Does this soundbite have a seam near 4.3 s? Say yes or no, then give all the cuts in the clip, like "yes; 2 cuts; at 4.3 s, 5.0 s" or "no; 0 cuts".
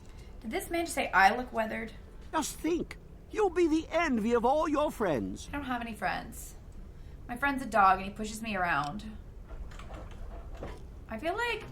no; 2 cuts; at 2.3 s, 9.4 s